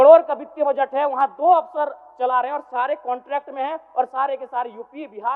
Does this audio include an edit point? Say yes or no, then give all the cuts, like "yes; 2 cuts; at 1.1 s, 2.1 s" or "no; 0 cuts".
no; 0 cuts